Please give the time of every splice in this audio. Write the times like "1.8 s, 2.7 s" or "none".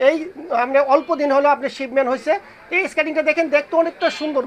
none

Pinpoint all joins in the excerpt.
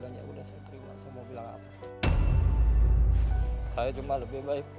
3.6 s

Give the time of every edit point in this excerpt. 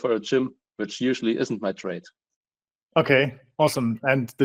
none

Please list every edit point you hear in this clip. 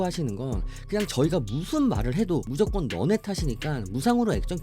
2.5 s

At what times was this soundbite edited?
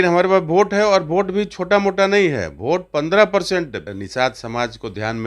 3.8 s

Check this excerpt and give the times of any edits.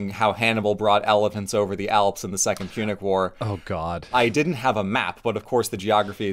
4.1 s

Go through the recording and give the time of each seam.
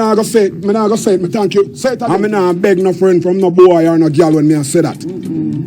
2.0 s

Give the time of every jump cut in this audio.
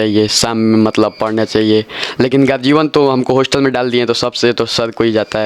none

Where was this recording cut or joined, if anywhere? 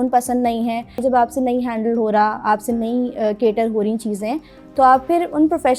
1.0 s

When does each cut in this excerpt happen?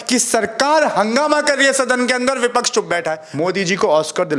3.2 s

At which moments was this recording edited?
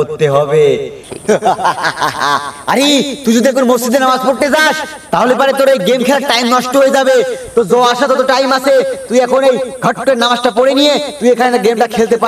1.1 s

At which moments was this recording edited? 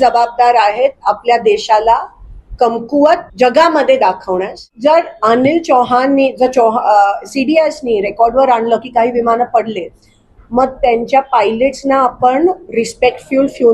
4.6 s

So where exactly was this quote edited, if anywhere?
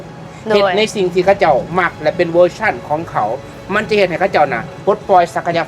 none

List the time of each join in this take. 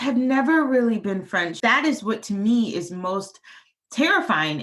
1.5 s

